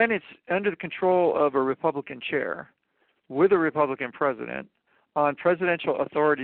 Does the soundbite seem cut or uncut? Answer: uncut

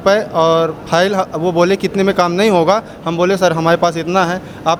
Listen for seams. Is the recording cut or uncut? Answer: uncut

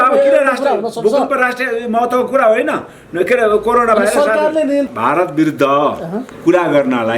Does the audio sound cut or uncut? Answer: cut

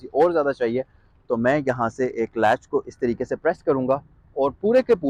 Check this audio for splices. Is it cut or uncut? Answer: uncut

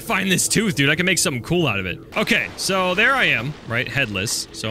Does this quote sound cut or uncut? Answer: cut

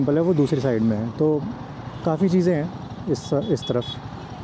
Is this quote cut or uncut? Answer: uncut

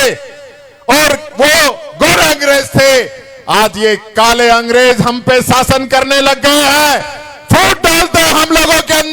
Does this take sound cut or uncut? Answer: uncut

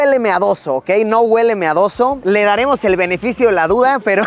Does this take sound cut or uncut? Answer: uncut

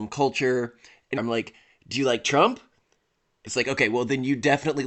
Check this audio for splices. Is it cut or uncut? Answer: cut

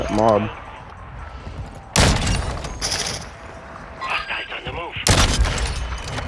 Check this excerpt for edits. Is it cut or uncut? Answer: uncut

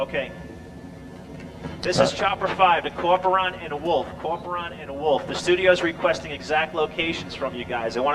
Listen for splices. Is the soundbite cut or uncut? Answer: cut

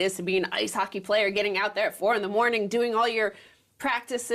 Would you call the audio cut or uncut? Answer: uncut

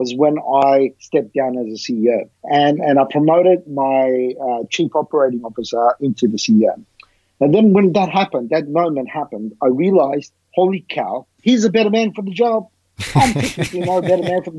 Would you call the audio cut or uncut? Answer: cut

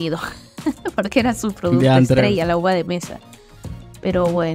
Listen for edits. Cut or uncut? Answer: uncut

